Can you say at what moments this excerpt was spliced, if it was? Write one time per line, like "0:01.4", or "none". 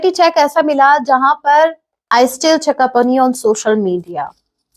0:01.9